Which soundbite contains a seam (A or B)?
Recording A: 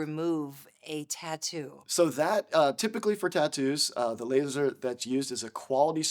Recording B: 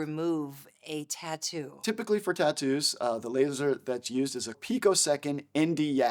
B